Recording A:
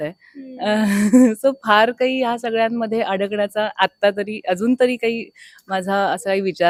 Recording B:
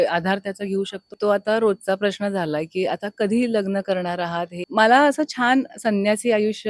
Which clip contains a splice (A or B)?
B